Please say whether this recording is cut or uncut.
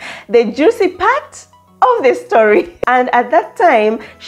cut